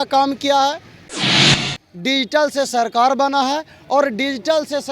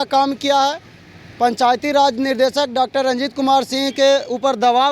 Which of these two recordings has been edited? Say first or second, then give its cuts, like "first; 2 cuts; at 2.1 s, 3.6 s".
first; 1 cut; at 1.4 s